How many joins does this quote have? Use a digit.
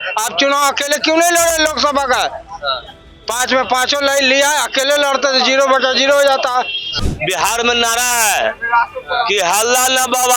1